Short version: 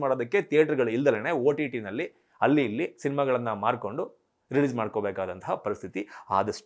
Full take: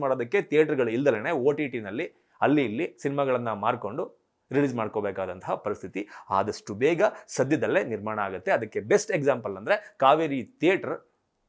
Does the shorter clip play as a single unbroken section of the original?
yes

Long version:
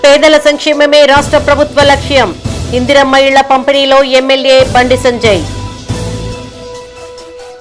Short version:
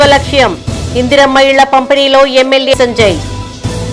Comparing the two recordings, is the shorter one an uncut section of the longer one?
no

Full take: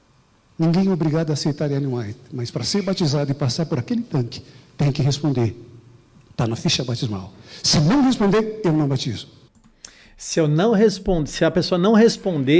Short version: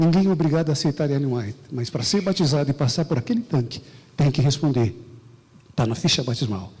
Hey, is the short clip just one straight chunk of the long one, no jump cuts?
yes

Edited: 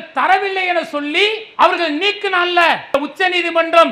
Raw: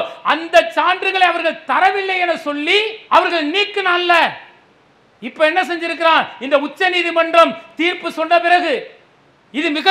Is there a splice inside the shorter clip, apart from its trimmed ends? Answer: yes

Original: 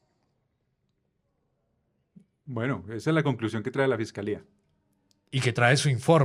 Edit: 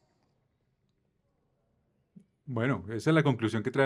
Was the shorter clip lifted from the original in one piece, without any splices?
yes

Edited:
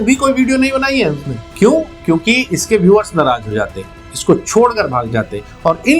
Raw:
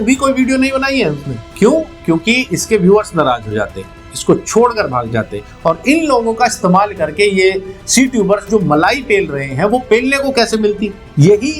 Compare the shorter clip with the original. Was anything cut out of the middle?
no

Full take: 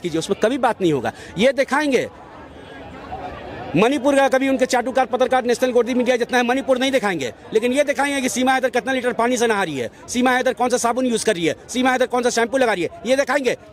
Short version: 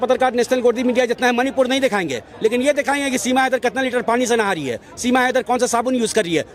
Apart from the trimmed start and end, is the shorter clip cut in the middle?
no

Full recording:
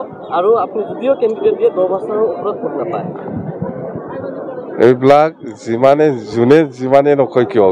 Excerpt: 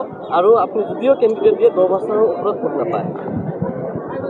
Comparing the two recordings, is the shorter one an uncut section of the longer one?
yes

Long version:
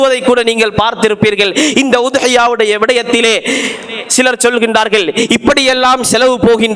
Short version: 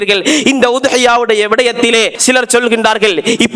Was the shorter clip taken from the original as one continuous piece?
no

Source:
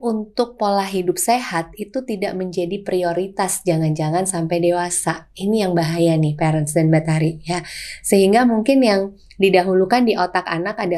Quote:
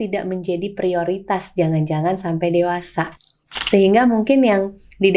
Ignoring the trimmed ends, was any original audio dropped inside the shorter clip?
yes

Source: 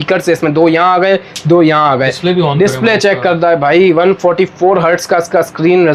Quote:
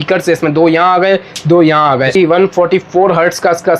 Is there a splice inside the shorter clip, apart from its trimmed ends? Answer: yes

